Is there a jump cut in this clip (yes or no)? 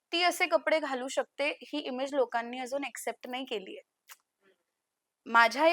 no